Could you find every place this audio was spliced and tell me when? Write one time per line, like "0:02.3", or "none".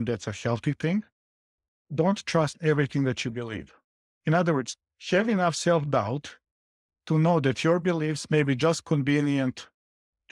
0:01.6